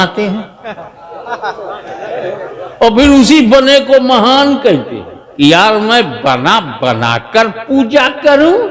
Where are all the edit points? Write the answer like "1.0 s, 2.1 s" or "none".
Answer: 5.2 s